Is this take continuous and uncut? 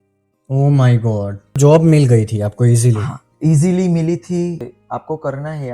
no; 2 cuts; at 1.6 s, 4.7 s

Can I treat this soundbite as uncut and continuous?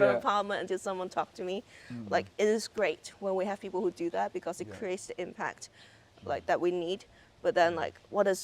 yes; 0 cuts

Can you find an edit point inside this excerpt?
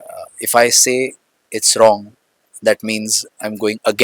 no; 0 cuts

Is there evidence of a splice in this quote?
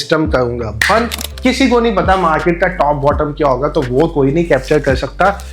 yes; 1 cut; at 1.2 s

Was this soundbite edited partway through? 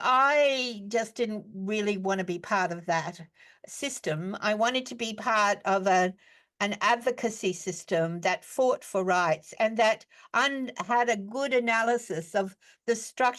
no; 0 cuts

